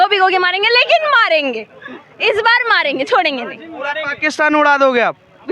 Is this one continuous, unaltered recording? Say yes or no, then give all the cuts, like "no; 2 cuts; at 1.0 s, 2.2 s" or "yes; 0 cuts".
yes; 0 cuts